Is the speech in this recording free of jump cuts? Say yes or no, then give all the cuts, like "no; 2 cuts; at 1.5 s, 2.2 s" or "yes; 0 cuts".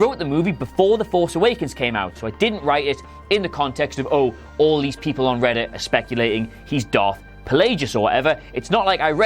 no; 2 cuts; at 2.2 s, 8.2 s